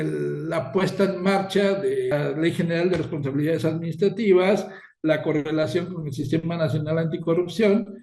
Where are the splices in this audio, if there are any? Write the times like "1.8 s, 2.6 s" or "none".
2.1 s